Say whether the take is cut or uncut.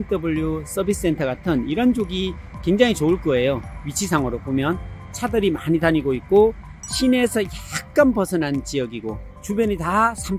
uncut